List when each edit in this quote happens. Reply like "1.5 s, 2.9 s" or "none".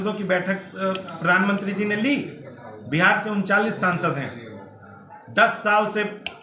none